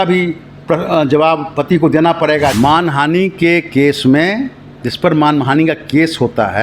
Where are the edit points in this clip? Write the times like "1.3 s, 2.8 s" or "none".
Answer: 2.5 s